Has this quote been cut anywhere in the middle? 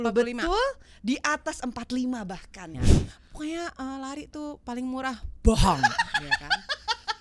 yes; 1 cut; at 2.7 s

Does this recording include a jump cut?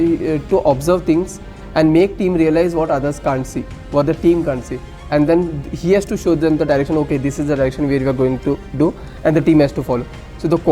no; 0 cuts

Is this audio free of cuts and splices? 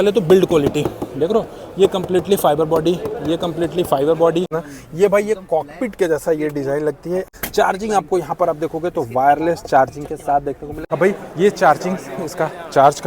no; 3 cuts; at 4.6 s, 7.4 s, 10.7 s

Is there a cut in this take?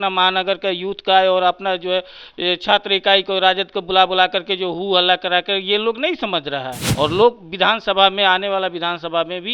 yes; 1 cut; at 6.8 s

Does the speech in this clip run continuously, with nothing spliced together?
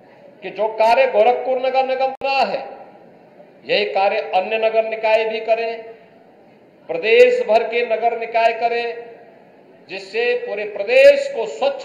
no; 1 cut; at 2.2 s

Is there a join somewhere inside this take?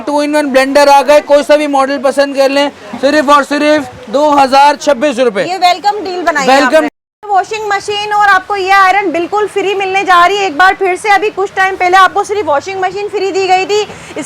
yes; 1 cut; at 6.9 s

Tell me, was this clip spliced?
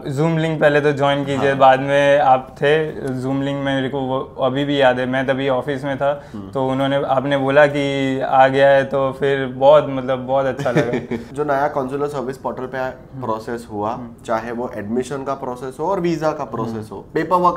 yes; 1 cut; at 11.3 s

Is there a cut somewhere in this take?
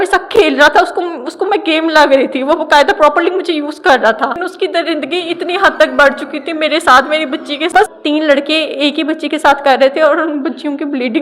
yes; 2 cuts; at 4.4 s, 7.9 s

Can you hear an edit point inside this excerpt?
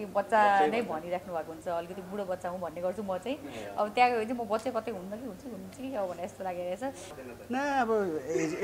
yes; 1 cut; at 7.1 s

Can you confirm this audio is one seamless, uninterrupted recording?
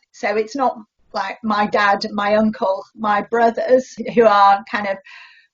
no; 1 cut; at 4.0 s

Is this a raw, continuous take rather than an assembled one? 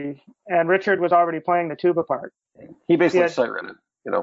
no; 1 cut; at 2.7 s

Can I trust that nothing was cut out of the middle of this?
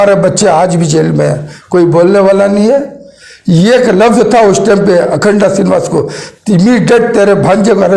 no; 1 cut; at 1.5 s

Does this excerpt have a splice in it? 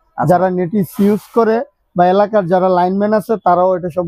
no; 0 cuts

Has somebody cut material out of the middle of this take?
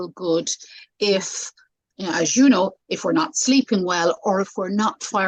no; 0 cuts

